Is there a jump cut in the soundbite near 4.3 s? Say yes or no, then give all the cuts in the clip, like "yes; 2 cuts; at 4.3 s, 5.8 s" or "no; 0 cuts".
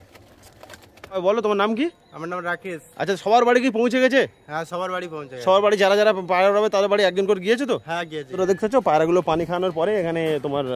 no; 2 cuts; at 1.2 s, 8.4 s